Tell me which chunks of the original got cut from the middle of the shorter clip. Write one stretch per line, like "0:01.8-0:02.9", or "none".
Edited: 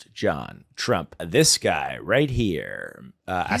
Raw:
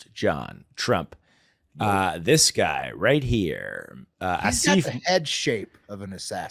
0:01.2-0:02.2